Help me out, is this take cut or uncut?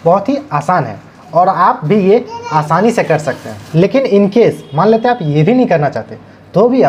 uncut